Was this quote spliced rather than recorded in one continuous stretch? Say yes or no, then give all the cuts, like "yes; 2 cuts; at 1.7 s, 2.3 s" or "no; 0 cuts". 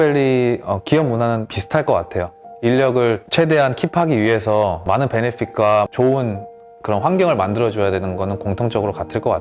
yes; 3 cuts; at 1.6 s, 3.2 s, 4.8 s